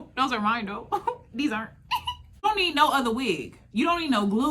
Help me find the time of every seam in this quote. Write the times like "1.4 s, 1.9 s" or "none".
2.3 s